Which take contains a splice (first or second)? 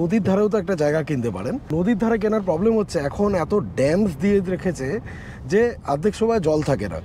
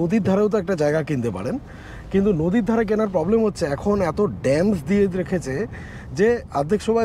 first